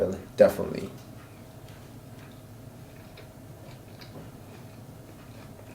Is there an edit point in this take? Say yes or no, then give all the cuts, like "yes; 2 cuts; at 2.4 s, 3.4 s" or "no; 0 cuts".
no; 0 cuts